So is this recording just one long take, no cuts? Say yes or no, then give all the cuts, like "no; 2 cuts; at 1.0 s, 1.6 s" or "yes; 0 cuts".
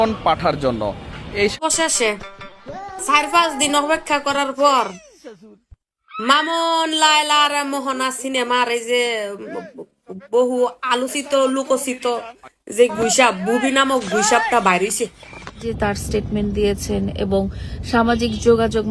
no; 2 cuts; at 1.6 s, 15.7 s